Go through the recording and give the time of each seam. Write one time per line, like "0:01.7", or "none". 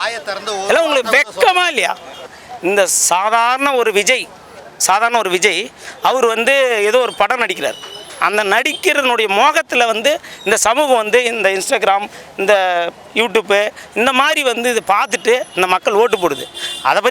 0:02.3

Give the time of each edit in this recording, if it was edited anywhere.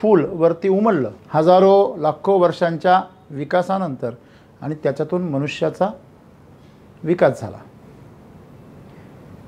0:01.2

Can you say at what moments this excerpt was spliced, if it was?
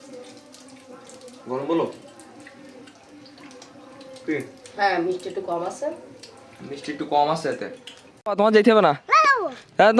0:08.2

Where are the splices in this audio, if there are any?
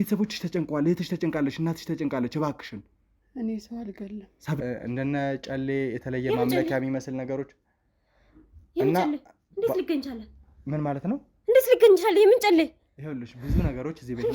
0:04.6

